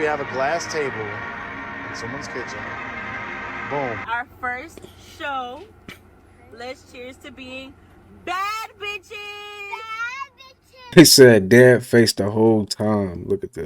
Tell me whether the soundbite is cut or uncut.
cut